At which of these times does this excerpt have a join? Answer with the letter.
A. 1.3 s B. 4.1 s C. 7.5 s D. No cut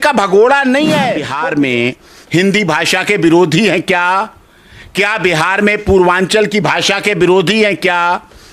A